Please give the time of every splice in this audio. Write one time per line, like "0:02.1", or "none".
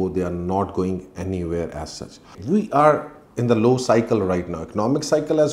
0:02.3